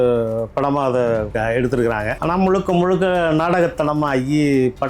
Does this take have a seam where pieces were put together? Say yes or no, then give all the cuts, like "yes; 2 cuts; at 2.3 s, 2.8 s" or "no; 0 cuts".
yes; 2 cuts; at 1.3 s, 2.2 s